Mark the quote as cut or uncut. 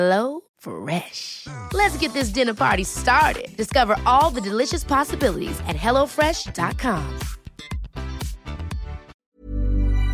cut